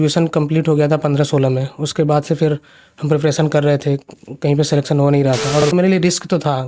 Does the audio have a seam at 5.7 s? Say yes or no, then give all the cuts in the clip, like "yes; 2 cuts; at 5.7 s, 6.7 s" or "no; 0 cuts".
yes; 1 cut; at 5.7 s